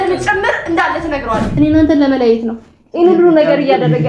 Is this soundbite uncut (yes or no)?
no